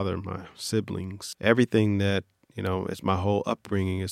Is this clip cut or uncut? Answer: cut